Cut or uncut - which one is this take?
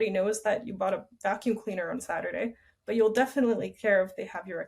uncut